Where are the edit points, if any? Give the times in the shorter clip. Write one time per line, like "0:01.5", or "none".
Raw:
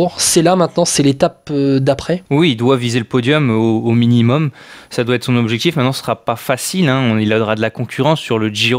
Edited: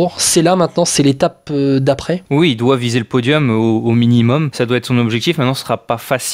0:04.5

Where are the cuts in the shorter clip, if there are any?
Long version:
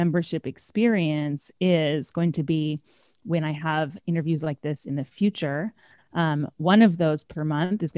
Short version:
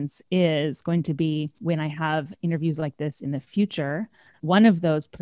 0:01.5
0:04.4

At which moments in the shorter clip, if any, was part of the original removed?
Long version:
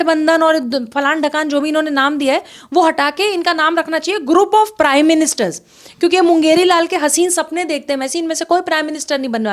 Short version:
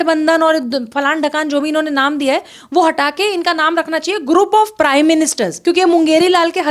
0:05.5

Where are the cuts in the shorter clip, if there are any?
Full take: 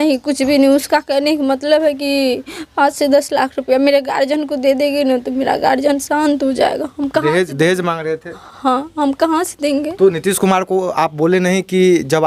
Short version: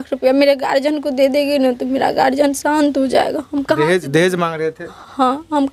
none

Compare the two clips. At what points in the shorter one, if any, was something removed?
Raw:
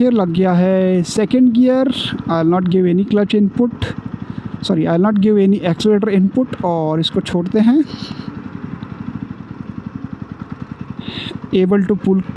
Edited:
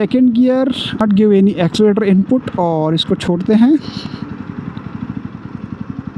0:01.0

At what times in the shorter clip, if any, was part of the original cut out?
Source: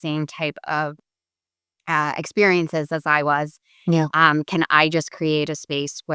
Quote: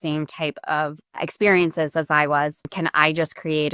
0:01.2
0:02.7

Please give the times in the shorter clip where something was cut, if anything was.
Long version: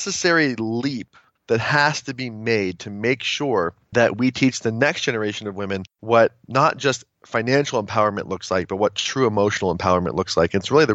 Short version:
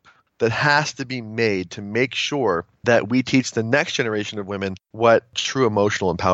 0:05.4

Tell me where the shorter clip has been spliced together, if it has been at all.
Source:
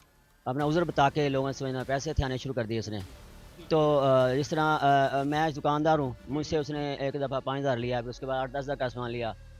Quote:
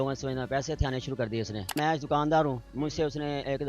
0:01.8

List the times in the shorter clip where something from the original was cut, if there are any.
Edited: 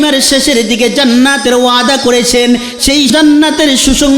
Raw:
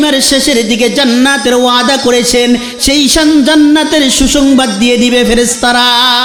0:03.1

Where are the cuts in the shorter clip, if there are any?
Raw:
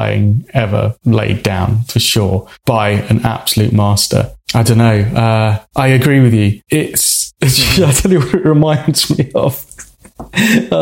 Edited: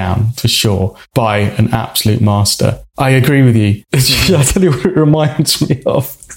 0:02.9
0:03.8

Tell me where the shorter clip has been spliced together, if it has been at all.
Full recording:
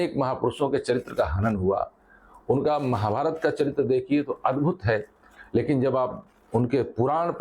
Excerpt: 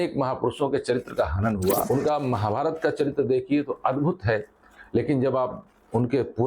0:01.8

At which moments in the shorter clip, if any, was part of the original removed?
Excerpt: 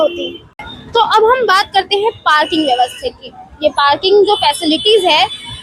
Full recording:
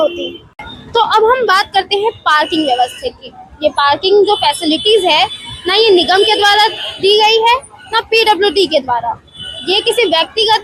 none

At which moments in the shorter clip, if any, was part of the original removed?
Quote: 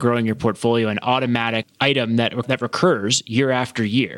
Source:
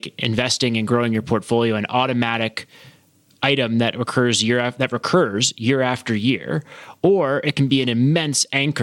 0:01.7
0:02.4

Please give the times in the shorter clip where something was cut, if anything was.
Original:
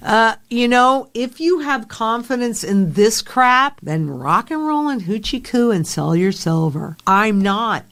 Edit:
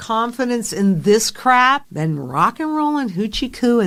none

